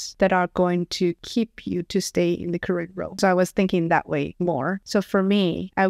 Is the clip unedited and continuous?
no; 1 cut; at 3.2 s

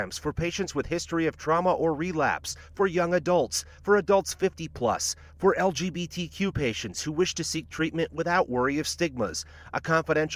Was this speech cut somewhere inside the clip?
no; 0 cuts

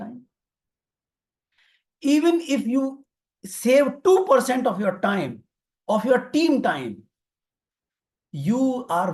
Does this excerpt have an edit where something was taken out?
no; 0 cuts

